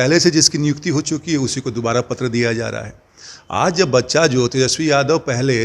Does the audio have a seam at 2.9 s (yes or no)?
no